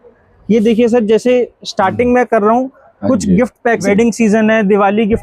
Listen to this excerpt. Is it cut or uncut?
cut